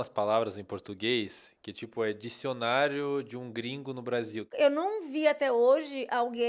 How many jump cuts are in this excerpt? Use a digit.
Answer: 1